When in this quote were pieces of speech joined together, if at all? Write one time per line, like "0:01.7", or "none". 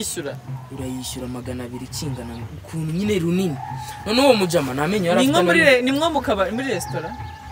none